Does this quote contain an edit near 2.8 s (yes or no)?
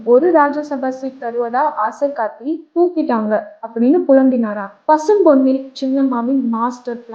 no